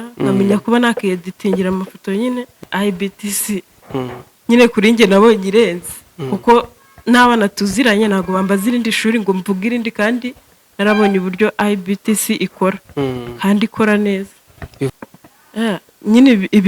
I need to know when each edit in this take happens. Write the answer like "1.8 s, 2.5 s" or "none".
2.5 s, 14.9 s